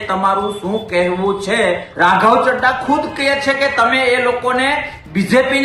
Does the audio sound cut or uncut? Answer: cut